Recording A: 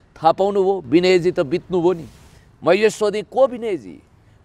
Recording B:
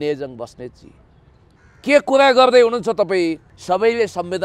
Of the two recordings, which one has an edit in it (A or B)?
B